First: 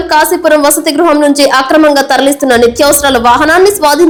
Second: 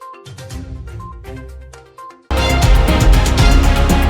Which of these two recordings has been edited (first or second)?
second